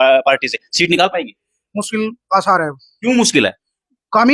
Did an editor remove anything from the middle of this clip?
no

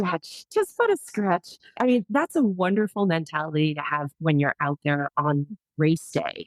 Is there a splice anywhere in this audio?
yes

